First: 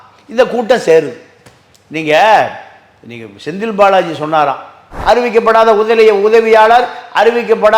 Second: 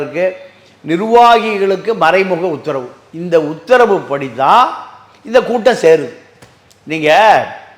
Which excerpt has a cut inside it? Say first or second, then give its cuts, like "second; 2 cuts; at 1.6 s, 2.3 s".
first; 1 cut; at 4.9 s